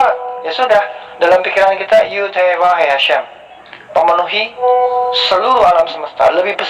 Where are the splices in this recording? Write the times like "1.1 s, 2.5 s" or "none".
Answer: none

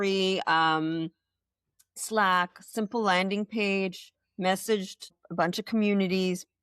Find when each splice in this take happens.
5.2 s

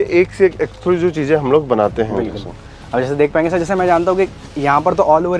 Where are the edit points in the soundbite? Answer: none

